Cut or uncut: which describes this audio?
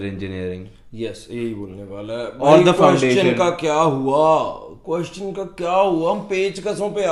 uncut